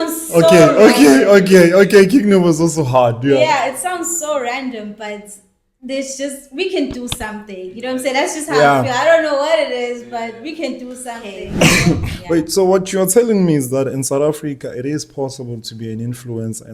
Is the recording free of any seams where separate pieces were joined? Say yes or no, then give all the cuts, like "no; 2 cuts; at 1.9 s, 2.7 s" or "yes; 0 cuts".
no; 1 cut; at 12.1 s